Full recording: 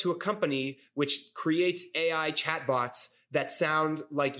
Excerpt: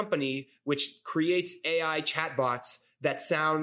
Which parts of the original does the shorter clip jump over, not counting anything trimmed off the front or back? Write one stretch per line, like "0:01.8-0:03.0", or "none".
none